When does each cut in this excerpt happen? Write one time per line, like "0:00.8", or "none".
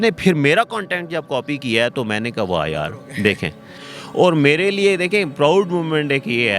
0:03.8